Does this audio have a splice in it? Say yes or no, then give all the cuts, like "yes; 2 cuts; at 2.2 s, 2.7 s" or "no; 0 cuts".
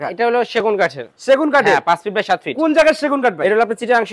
no; 0 cuts